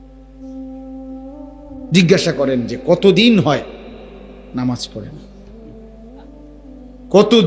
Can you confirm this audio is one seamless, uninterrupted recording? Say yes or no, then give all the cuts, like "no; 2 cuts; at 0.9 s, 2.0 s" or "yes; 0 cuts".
yes; 0 cuts